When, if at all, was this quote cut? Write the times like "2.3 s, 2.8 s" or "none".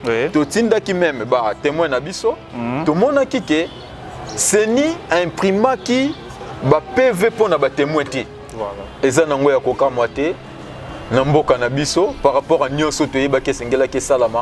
8.4 s